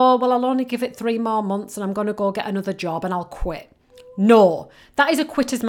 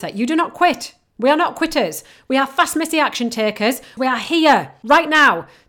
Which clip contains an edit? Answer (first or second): second